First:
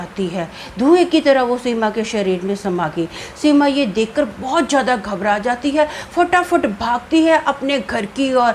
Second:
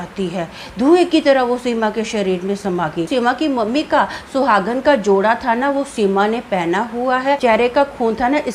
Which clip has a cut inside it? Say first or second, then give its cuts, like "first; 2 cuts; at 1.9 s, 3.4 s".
second; 2 cuts; at 3.1 s, 7.4 s